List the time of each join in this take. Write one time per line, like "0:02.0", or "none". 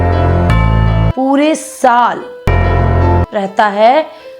0:01.0